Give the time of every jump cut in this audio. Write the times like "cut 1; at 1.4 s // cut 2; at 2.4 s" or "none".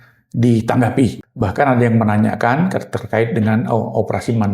cut 1; at 1.2 s